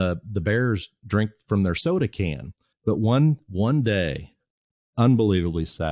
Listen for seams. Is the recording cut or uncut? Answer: cut